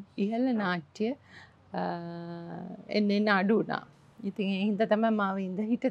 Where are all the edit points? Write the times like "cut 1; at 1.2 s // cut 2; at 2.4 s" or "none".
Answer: none